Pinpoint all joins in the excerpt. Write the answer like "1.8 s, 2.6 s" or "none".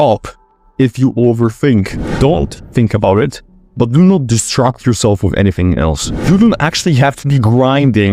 2.0 s, 6.2 s